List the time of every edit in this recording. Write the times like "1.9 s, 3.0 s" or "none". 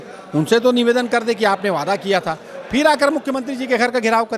none